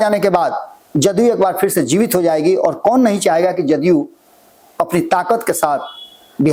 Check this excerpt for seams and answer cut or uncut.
uncut